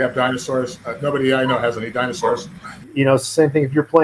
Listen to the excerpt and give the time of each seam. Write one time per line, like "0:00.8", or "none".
0:02.8